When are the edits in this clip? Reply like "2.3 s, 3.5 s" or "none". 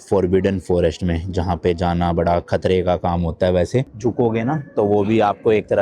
3.9 s

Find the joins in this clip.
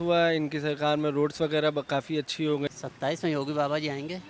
2.8 s

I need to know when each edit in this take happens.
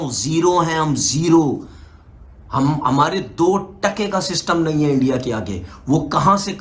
none

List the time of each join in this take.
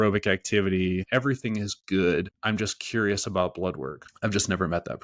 1.1 s, 2.3 s, 4.0 s

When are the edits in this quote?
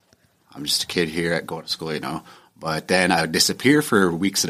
none

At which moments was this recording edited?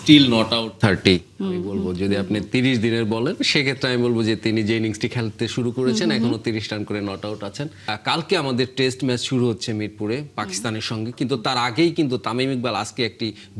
7.9 s

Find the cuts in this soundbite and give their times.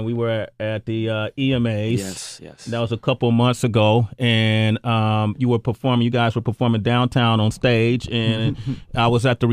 1.8 s

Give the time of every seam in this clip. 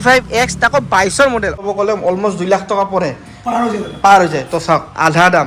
1.6 s

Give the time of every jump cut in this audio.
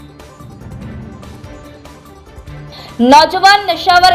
none

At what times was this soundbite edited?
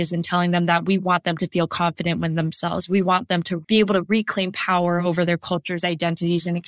none

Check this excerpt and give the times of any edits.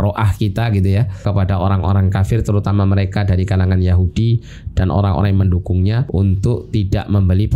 1.2 s, 6.0 s

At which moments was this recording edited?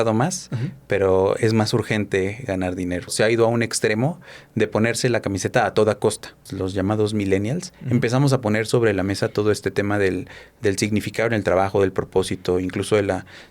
3.1 s, 6.5 s

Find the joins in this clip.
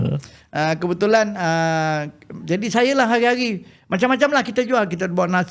none

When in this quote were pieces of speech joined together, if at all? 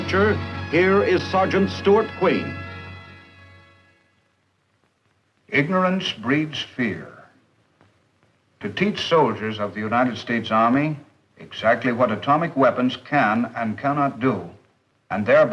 13.4 s

